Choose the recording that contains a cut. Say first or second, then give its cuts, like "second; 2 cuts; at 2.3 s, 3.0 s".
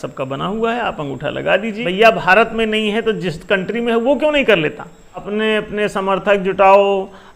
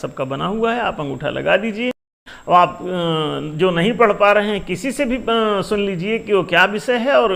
first; 2 cuts; at 1.8 s, 5.3 s